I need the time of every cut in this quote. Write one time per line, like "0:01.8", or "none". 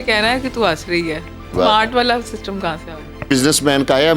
0:01.5
0:03.2